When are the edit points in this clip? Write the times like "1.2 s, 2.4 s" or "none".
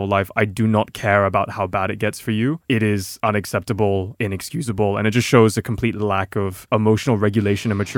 none

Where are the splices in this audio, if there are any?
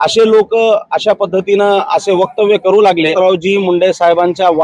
3.1 s

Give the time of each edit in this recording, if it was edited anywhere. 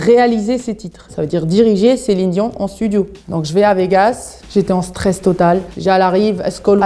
none

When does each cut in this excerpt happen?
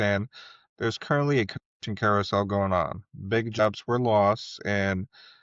none

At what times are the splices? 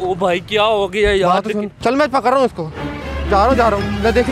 1.8 s

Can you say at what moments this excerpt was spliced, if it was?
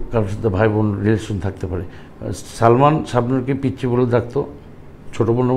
none

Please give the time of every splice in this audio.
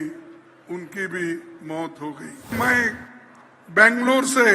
2.5 s

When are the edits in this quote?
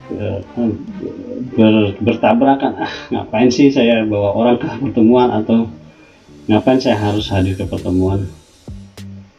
8.5 s

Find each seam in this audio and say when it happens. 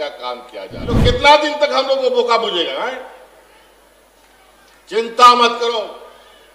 1.0 s

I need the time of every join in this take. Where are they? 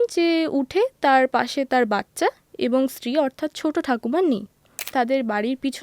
4.9 s

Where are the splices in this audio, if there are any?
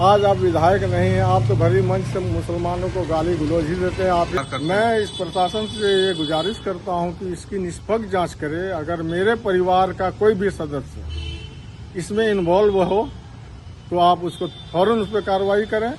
4.4 s

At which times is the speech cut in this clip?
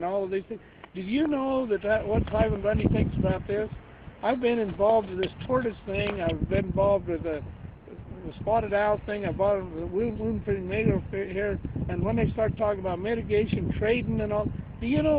1.3 s

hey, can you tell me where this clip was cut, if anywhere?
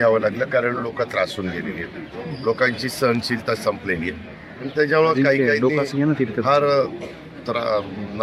none

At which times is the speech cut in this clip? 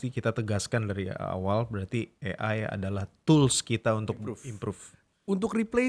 none

